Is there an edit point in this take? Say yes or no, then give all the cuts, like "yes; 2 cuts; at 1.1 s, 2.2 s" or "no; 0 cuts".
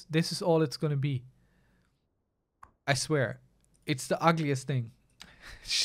no; 0 cuts